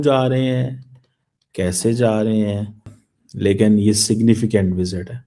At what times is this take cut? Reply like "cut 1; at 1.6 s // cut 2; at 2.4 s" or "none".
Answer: cut 1; at 2.9 s

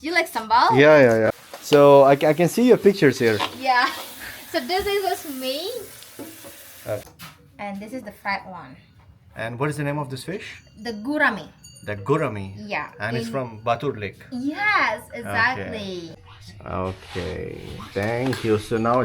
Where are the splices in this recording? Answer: cut 1; at 1.4 s // cut 2; at 7.0 s // cut 3; at 16.1 s

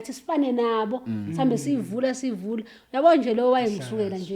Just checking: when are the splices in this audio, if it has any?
none

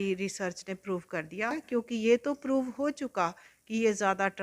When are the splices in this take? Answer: cut 1; at 1.6 s

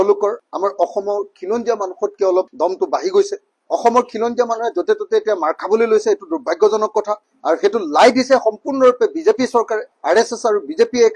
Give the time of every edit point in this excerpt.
none

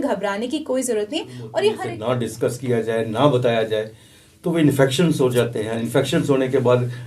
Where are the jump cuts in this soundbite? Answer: cut 1; at 1.9 s

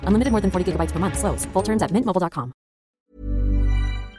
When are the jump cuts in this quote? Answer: cut 1; at 3.0 s

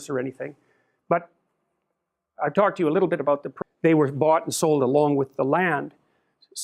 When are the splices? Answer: none

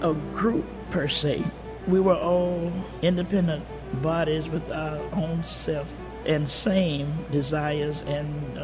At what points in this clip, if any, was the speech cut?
cut 1; at 2.9 s // cut 2; at 6.2 s

